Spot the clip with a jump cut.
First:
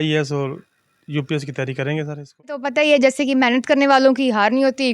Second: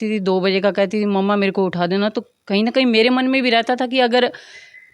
first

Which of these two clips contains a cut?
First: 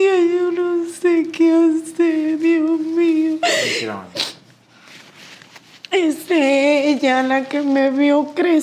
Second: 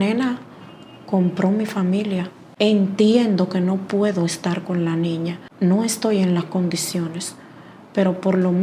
second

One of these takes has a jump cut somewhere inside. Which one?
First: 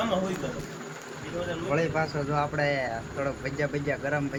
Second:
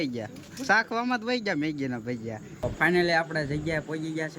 second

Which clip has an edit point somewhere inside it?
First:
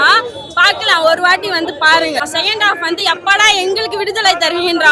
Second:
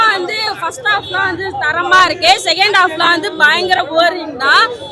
first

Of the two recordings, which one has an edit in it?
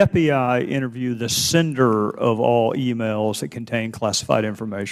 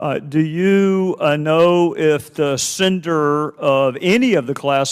first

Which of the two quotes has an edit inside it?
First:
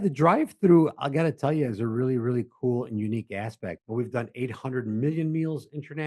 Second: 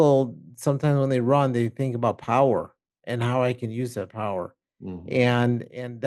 first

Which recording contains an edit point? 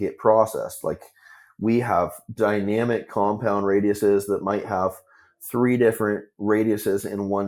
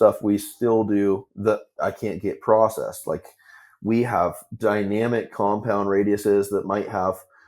second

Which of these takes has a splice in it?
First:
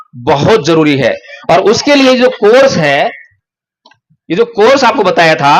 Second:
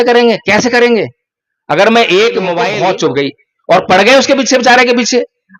second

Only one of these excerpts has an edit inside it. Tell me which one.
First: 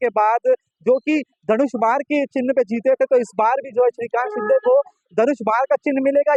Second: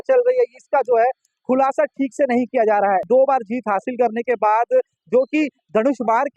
second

